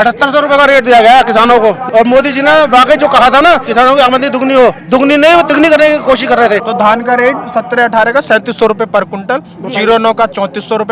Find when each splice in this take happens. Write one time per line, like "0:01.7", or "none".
0:01.8
0:03.7
0:04.8
0:06.7